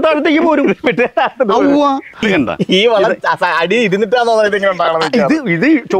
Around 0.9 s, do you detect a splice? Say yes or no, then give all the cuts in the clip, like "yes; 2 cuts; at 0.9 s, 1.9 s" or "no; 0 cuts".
no; 1 cut; at 2.2 s